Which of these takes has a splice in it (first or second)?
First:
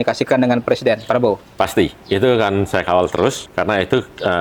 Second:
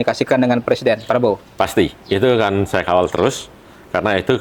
first